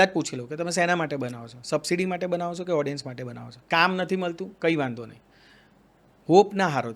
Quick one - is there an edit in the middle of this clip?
yes; 1 cut; at 3.6 s

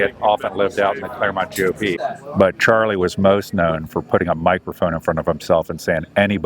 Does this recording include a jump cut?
yes; 1 cut; at 2.0 s

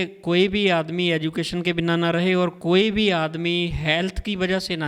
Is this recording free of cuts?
yes; 0 cuts

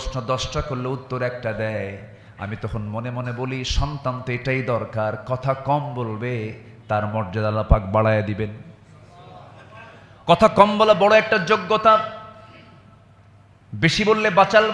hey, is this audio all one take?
yes; 0 cuts

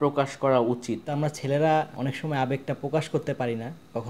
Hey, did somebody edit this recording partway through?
yes; 2 cuts; at 1.1 s, 1.9 s

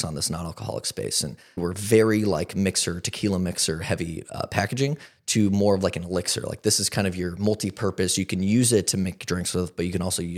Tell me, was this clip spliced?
yes; 1 cut; at 1.6 s

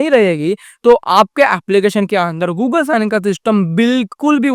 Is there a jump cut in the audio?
no; 0 cuts

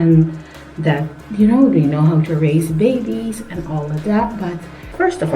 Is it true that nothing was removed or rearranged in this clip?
yes; 0 cuts

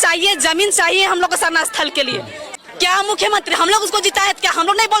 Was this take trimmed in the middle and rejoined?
yes; 1 cut; at 2.5 s

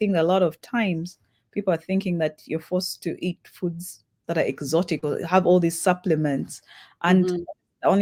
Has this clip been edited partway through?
no; 0 cuts

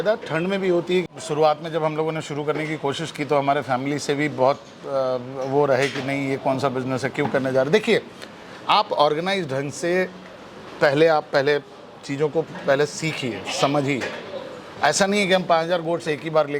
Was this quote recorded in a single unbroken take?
no; 1 cut; at 1.0 s

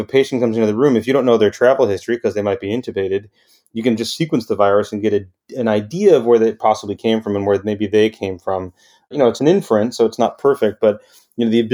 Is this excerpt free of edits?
no; 1 cut; at 9.1 s

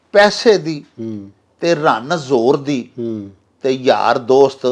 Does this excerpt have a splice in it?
no; 0 cuts

